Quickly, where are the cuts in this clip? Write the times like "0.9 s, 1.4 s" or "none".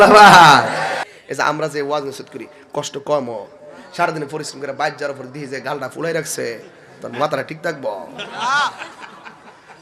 1.0 s